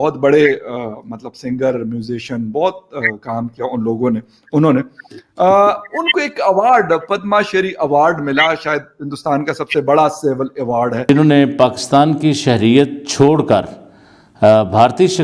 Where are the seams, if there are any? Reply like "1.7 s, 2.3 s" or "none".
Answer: 11.1 s